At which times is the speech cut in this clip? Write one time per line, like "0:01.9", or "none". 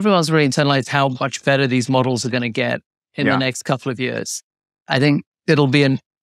0:04.8